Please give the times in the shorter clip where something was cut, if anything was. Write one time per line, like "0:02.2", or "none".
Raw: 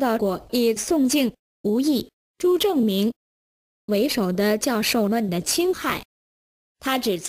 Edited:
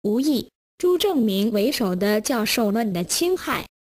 0:01.6